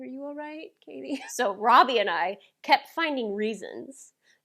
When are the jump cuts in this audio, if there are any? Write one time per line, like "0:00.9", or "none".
0:01.3